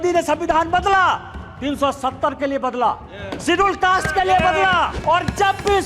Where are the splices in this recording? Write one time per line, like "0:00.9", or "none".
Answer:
0:04.9